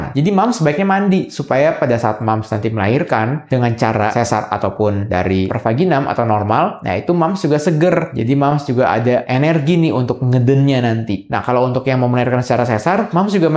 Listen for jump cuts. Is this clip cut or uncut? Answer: uncut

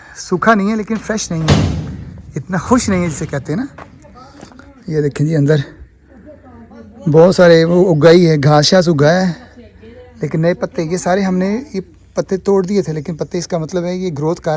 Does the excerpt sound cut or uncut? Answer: uncut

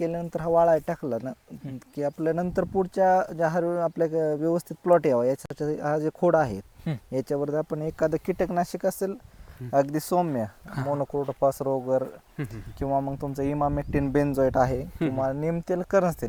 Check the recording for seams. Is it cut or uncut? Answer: uncut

